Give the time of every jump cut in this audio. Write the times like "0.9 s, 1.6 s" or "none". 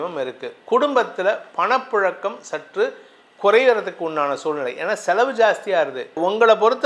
none